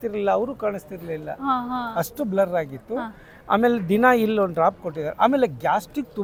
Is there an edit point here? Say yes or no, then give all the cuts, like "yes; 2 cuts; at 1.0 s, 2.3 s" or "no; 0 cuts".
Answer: no; 0 cuts